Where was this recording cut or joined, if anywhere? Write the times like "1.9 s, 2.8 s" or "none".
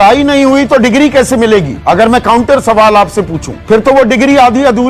1.7 s